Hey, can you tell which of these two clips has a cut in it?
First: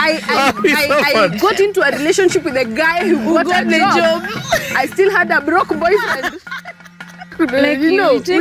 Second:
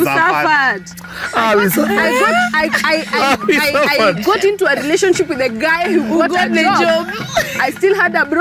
first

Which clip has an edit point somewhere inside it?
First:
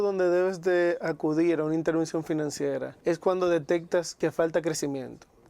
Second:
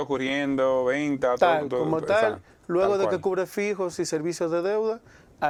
first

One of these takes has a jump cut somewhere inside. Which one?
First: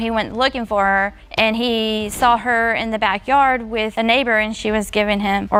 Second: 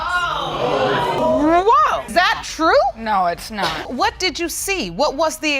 second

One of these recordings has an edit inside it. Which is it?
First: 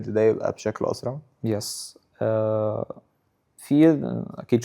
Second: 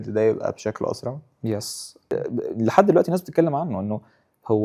second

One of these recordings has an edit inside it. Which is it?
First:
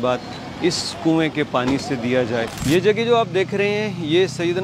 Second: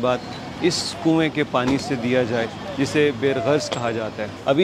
first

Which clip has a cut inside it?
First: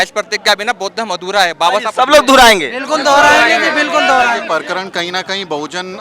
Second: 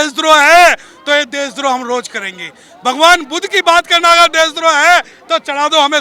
first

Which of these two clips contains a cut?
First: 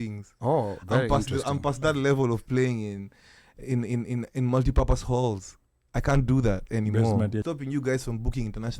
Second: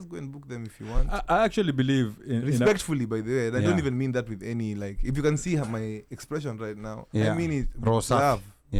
first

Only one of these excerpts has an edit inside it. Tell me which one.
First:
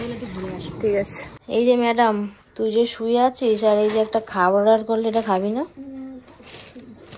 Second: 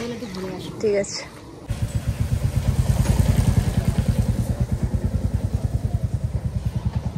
first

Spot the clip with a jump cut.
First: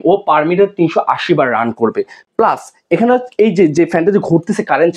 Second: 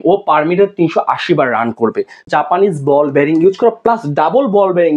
second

